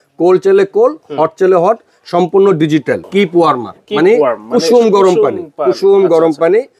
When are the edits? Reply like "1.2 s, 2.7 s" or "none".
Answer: 3.0 s